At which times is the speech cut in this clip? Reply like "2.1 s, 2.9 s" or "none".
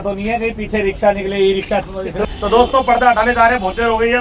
2.3 s